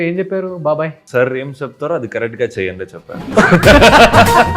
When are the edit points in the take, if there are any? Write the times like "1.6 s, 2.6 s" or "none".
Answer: 1.0 s